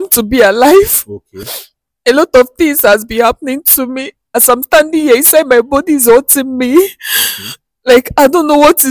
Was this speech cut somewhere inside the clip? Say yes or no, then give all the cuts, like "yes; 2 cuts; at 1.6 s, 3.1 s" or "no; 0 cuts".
yes; 1 cut; at 4.2 s